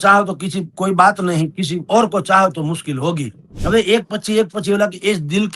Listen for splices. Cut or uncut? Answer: cut